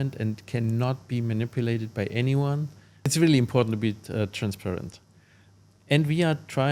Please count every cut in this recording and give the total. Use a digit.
2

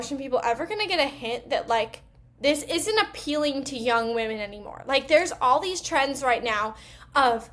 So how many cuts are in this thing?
0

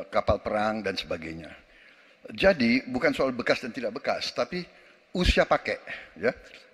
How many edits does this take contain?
0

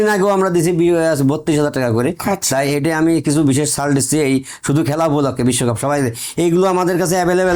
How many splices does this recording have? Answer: 0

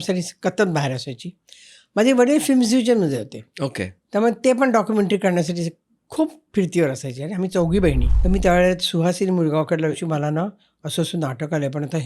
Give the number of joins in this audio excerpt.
2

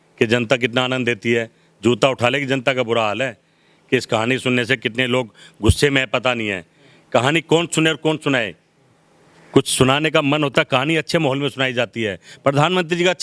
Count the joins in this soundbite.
0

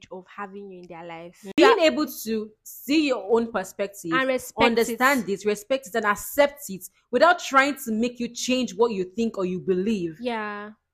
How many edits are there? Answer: 1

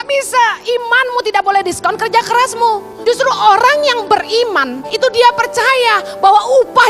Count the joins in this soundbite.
2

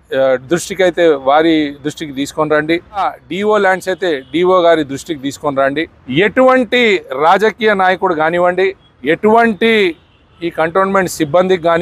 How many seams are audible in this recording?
3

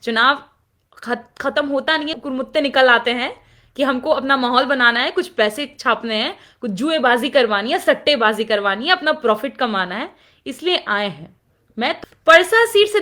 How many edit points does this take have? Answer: 1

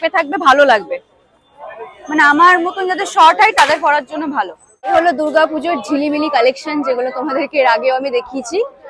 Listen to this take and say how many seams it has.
1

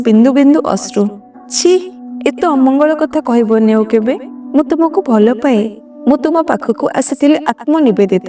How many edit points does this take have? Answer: 1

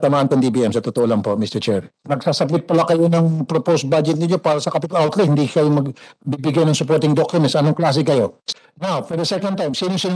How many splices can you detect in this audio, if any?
2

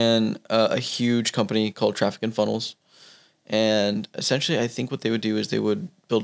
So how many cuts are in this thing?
0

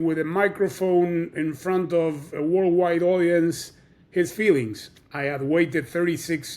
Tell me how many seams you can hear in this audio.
1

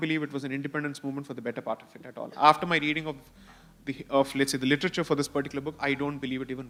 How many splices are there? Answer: 0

